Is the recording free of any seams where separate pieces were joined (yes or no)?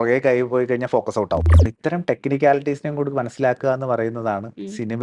no